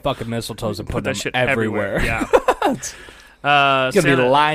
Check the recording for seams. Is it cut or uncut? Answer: uncut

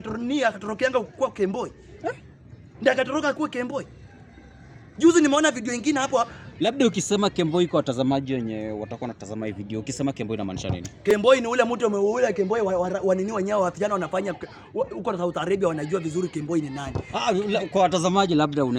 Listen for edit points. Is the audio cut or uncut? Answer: uncut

